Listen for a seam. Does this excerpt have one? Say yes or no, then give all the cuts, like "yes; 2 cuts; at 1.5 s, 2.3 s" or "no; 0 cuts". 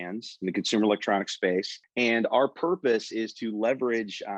yes; 1 cut; at 1.8 s